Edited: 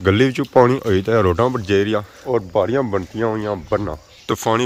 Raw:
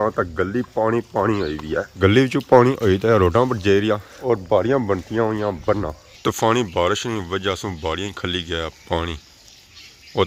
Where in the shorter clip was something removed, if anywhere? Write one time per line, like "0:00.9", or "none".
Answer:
none